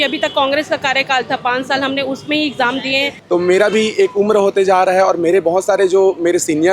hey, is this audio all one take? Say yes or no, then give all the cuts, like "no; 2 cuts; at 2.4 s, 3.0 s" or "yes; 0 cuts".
no; 1 cut; at 3.1 s